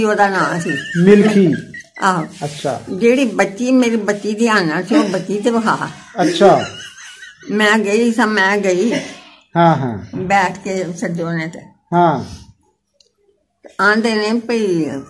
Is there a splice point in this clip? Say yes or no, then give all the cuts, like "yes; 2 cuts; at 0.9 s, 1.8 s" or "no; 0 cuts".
no; 0 cuts